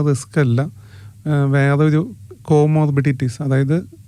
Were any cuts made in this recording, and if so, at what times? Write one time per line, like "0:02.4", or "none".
none